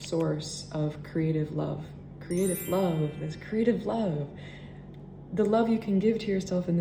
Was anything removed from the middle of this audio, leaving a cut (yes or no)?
no